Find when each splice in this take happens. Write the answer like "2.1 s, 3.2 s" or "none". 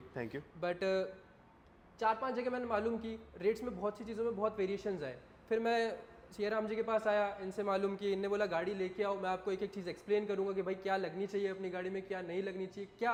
none